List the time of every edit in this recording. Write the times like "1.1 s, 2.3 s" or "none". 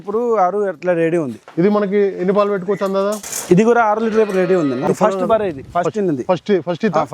1.4 s, 3.3 s, 4.8 s